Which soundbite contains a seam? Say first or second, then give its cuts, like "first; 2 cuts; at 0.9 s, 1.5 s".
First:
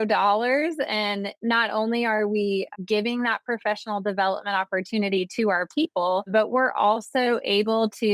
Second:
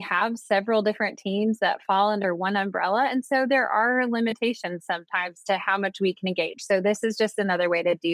first; 3 cuts; at 1.3 s, 2.7 s, 6.3 s